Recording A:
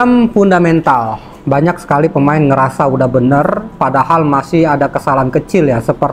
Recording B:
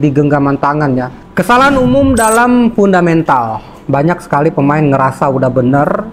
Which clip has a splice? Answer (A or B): B